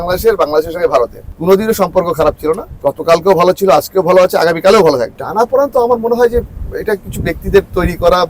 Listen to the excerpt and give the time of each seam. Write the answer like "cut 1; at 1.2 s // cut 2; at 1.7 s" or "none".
cut 1; at 1.2 s // cut 2; at 2.7 s // cut 3; at 5.2 s

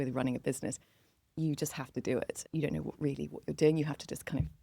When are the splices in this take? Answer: cut 1; at 2.4 s

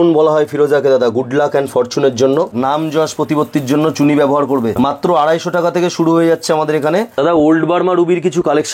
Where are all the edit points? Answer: cut 1; at 2.5 s // cut 2; at 4.8 s // cut 3; at 7.1 s

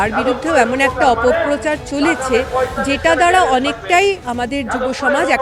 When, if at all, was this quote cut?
none

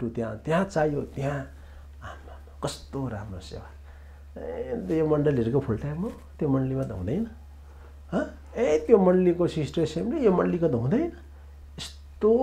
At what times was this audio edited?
none

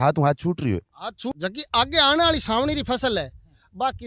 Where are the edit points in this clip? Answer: cut 1; at 1.3 s

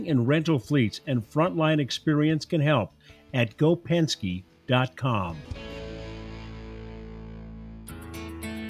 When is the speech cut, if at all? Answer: cut 1; at 7.8 s

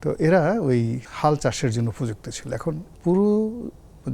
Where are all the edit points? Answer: cut 1; at 1.0 s // cut 2; at 2.9 s

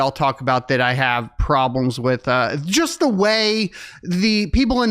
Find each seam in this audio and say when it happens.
none

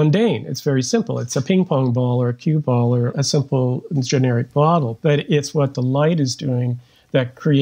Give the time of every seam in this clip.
cut 1; at 3.2 s

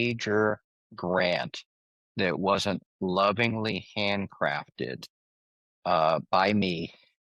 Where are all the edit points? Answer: none

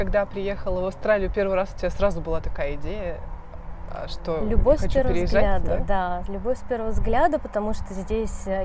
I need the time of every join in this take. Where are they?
none

